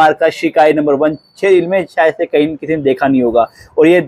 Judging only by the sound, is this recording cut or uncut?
uncut